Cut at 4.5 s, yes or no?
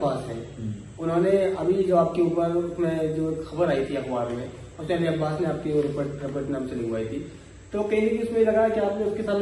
no